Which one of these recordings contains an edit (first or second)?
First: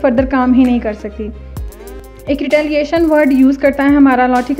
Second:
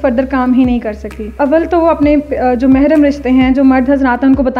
second